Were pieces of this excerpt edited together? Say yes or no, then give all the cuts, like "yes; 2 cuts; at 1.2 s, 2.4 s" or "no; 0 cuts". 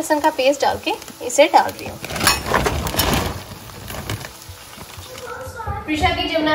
yes; 1 cut; at 5.3 s